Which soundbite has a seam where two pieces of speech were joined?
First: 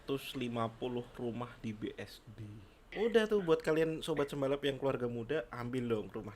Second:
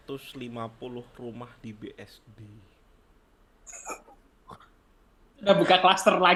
first; 1 cut; at 2.9 s

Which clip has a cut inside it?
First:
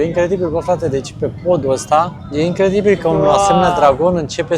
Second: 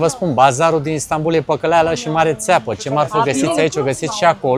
first; 1 cut; at 2.2 s

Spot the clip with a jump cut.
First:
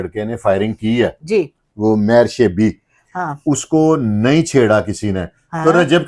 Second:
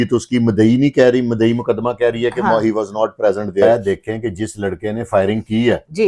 second; 1 cut; at 3.6 s

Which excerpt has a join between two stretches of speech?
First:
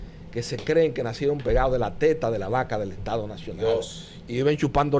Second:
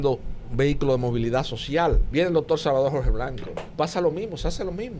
second; 2 cuts; at 2.0 s, 3.6 s

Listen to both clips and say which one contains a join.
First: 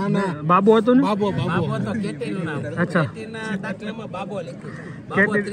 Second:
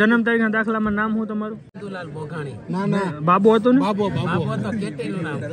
second; 1 cut; at 1.7 s

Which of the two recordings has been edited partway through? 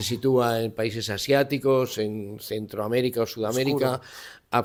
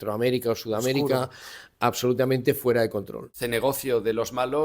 second; 1 cut; at 3.2 s

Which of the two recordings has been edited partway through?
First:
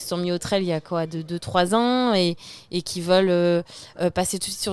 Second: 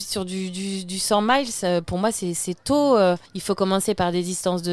second; 1 cut; at 3.3 s

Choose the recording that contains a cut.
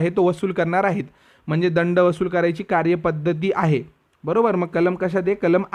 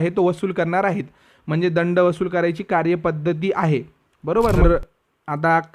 second; 1 cut; at 4.6 s

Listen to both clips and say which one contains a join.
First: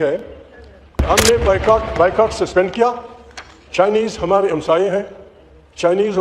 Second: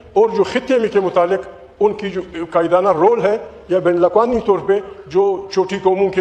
first; 1 cut; at 1.0 s

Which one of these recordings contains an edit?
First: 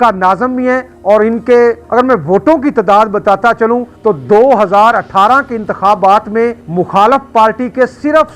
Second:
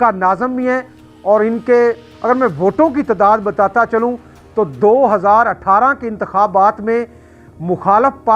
first; 4 cuts; at 0.9 s, 1.8 s, 3.9 s, 6.6 s

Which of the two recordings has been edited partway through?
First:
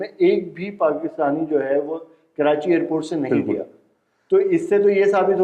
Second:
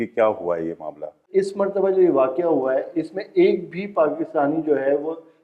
second; 1 cut; at 1.2 s

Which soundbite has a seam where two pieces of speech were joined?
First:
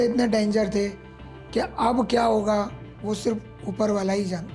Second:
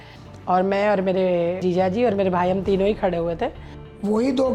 second; 2 cuts; at 1.6 s, 3.7 s

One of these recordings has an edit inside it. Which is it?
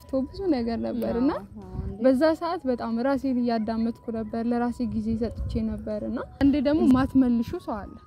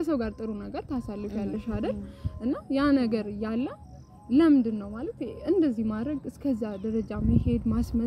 first; 1 cut; at 6.4 s

